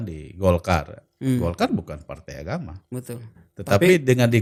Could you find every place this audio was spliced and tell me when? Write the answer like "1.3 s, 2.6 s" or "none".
none